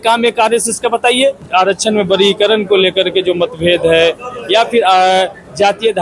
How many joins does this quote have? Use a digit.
1